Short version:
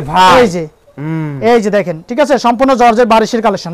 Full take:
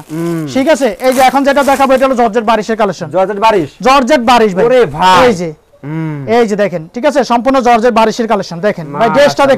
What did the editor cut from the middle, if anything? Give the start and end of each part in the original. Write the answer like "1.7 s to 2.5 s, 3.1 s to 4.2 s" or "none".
none